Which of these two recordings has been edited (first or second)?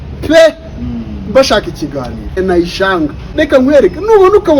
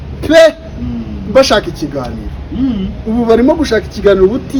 first